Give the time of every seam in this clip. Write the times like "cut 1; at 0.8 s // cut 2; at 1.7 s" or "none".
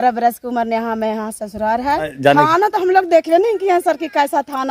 cut 1; at 2.1 s